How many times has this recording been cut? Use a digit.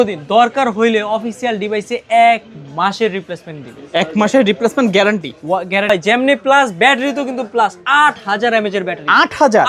1